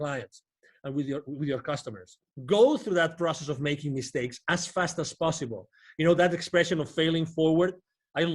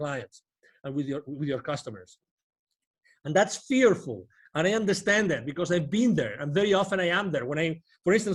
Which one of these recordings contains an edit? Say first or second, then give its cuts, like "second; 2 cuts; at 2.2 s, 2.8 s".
first; 1 cut; at 2.3 s